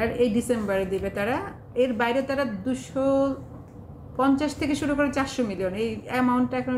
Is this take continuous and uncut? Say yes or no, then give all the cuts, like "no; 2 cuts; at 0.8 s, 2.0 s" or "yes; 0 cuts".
yes; 0 cuts